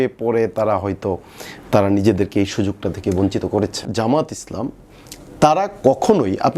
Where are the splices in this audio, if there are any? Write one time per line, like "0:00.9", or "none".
0:03.9